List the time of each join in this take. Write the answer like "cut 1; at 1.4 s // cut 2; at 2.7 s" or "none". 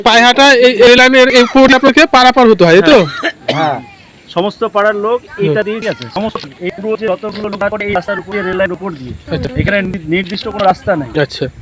none